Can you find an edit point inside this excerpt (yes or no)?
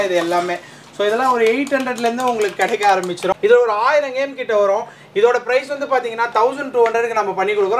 yes